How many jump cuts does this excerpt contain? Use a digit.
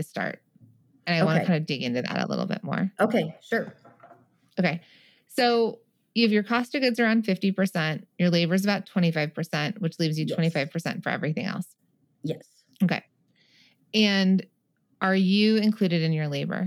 0